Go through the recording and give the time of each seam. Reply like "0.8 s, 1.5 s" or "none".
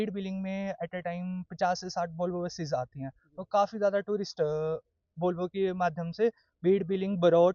none